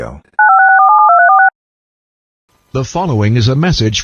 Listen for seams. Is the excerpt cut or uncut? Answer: cut